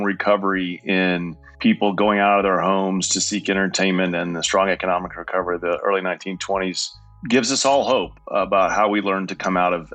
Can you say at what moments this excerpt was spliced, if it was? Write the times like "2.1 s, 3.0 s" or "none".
7.1 s, 8.2 s